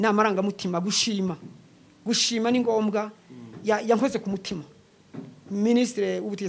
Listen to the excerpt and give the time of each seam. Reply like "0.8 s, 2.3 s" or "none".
none